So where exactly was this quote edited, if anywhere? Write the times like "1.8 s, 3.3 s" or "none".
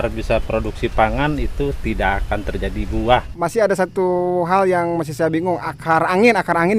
3.3 s